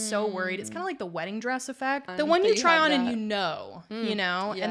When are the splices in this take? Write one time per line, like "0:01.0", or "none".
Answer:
0:02.1